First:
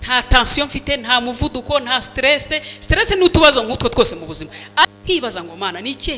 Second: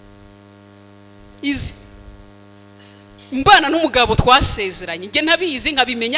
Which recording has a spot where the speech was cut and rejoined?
first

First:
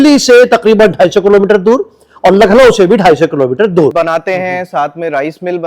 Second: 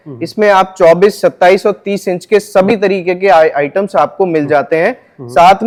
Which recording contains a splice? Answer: first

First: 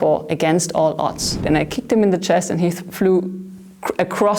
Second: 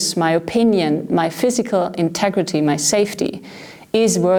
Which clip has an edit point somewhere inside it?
first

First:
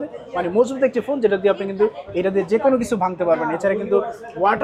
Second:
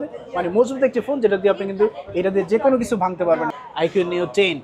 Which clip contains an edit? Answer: second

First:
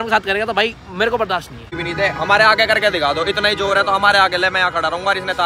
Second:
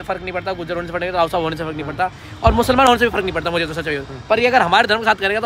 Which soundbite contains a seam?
first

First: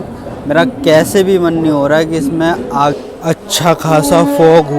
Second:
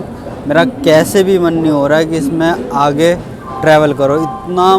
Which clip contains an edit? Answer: first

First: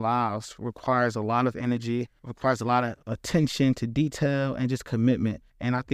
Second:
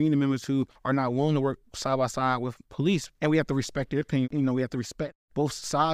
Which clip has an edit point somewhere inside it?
second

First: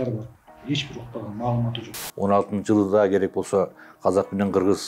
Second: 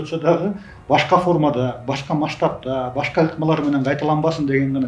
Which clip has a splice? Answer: first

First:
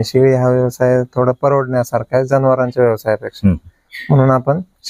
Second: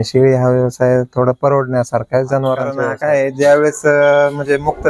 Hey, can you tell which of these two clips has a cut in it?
second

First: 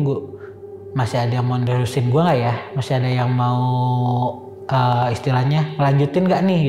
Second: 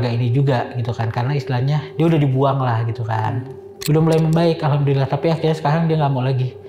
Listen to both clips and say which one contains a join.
second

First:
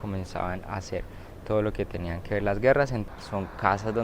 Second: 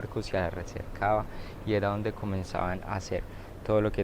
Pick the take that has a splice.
first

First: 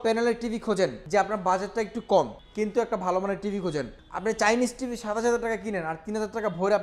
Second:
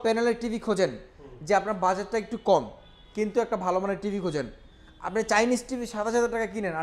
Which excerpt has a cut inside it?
first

